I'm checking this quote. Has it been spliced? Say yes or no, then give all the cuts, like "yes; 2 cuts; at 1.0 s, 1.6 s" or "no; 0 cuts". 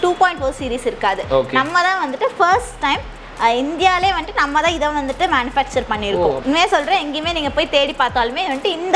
yes; 1 cut; at 6.4 s